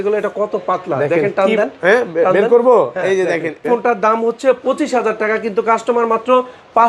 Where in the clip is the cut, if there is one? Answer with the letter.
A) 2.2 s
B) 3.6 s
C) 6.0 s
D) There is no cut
B